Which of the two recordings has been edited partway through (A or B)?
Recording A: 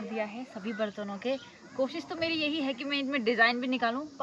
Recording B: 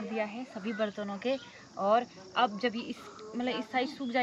A